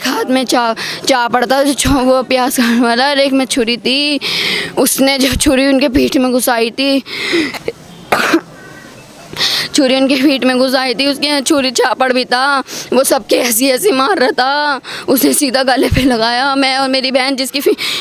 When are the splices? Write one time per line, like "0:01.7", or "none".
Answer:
none